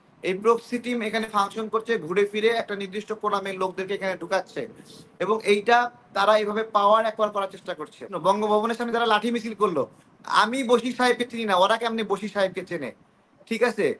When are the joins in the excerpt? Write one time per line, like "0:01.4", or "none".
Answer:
0:08.1